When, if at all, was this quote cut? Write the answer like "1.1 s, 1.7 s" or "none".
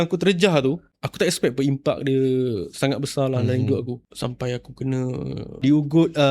1.0 s, 4.0 s, 5.6 s